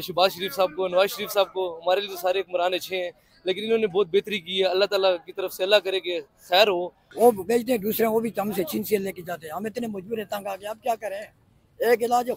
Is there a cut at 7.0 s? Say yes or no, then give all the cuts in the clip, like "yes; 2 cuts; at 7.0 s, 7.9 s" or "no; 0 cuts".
yes; 1 cut; at 7.0 s